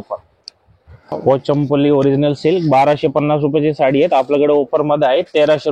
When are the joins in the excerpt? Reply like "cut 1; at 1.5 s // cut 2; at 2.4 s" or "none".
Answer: cut 1; at 1.1 s